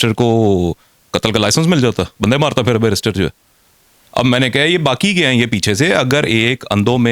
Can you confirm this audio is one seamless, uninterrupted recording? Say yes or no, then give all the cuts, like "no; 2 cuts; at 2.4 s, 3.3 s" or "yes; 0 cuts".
yes; 0 cuts